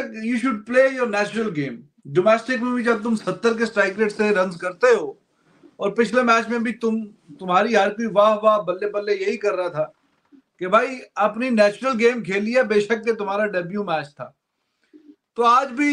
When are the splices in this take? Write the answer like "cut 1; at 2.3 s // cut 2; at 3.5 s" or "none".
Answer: none